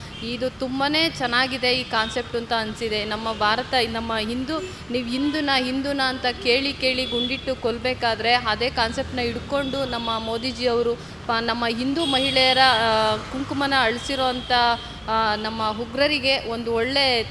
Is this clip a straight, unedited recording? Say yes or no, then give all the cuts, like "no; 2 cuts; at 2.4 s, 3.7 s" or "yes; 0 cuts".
yes; 0 cuts